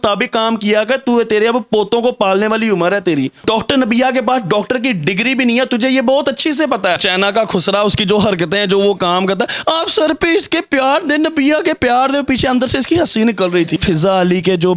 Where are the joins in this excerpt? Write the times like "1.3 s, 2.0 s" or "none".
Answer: 3.4 s, 7.0 s, 13.8 s